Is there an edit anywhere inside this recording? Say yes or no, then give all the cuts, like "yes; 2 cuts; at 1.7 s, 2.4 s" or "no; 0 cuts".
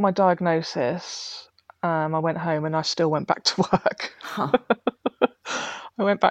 no; 0 cuts